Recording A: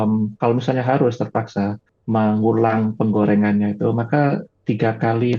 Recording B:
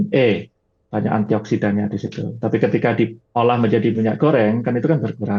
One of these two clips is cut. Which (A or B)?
A